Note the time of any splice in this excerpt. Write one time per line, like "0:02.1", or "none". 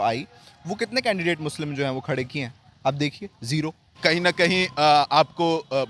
0:03.9